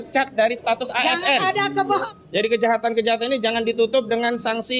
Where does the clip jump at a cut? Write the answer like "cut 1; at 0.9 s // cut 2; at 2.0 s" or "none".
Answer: cut 1; at 2.0 s